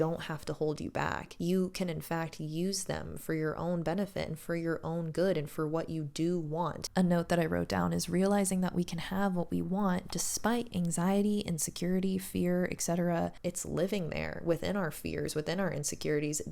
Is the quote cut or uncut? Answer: cut